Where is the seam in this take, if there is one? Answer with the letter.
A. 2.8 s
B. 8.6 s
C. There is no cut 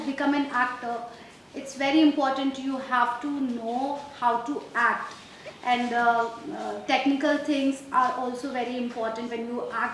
C